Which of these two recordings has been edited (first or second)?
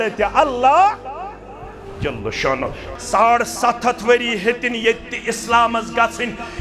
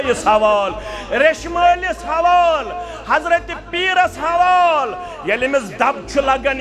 first